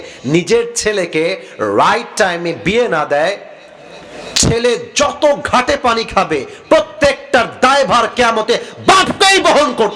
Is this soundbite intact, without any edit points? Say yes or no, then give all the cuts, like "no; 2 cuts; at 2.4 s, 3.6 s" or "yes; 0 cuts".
yes; 0 cuts